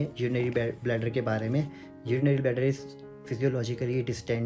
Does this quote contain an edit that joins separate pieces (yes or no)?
no